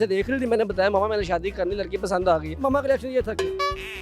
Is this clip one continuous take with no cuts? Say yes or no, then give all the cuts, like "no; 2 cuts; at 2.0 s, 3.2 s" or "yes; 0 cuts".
no; 1 cut; at 2.6 s